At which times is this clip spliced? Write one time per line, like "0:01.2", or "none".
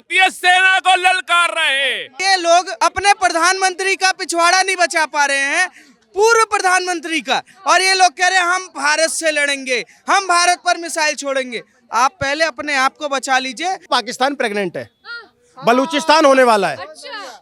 0:02.1
0:02.7
0:13.8